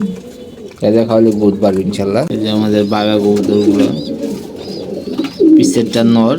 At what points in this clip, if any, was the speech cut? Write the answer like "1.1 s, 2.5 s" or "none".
2.3 s